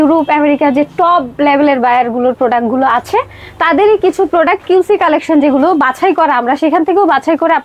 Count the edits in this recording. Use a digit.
0